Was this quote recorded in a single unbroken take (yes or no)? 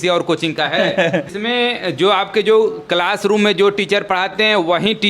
no